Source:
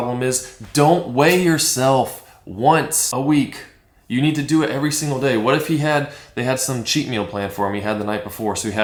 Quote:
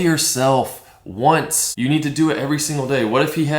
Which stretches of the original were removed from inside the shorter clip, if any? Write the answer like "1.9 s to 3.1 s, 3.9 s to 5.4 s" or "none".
3.0 s to 3.9 s